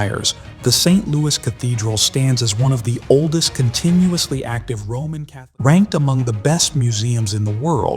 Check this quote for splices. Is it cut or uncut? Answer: cut